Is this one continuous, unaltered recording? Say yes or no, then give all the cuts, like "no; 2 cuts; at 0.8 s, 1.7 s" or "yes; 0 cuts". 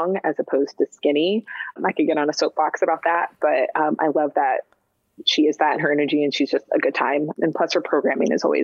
no; 1 cut; at 7.3 s